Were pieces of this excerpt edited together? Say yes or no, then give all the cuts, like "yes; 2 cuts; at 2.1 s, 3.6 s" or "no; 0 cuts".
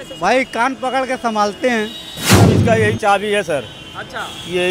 yes; 1 cut; at 2.3 s